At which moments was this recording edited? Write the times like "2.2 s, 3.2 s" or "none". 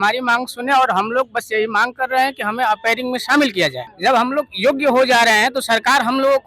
3.9 s